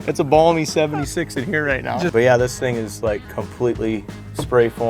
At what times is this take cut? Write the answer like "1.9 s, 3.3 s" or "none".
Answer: 2.1 s